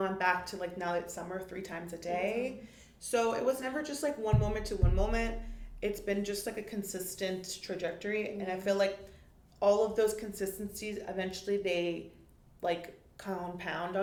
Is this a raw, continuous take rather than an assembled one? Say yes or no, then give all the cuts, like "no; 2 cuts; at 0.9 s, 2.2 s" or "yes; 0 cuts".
yes; 0 cuts